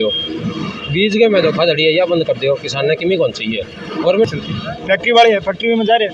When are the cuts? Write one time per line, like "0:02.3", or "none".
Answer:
0:04.3

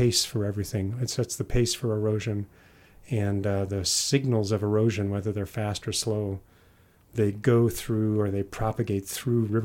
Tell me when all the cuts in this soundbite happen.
none

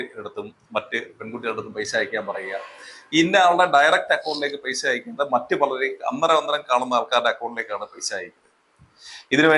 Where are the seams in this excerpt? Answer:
none

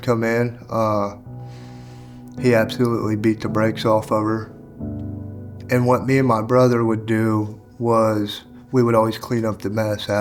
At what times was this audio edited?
none

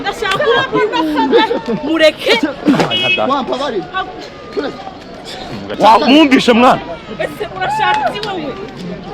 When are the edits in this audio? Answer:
0:05.8

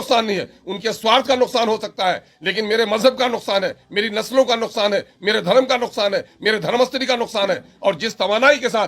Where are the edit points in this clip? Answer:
none

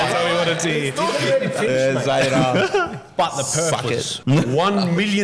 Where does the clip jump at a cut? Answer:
0:04.1

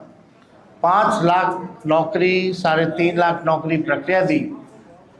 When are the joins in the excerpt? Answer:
none

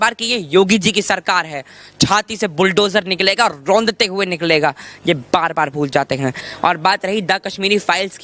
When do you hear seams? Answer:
0:06.5

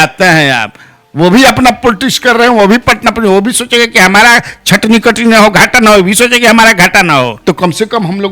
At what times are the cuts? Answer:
0:07.3

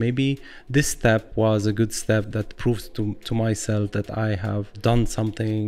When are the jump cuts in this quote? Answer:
0:04.8

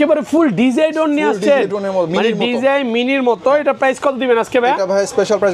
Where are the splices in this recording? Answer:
none

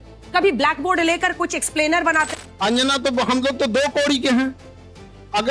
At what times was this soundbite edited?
0:02.3

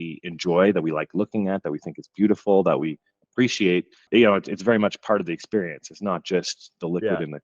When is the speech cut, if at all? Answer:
0:04.0

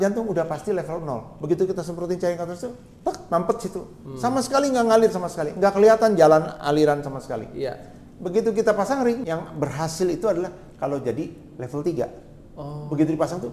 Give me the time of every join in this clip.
0:09.2

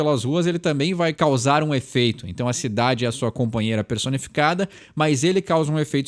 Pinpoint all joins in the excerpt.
0:01.1

